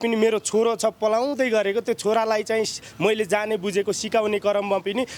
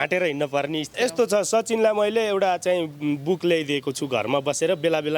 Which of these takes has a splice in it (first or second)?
second